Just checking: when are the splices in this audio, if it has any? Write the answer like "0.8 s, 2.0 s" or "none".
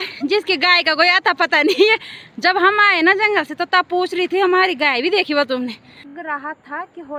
6.1 s